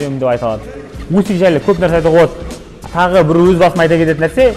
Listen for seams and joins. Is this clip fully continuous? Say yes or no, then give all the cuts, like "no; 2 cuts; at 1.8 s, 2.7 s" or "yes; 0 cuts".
no; 1 cut; at 1.0 s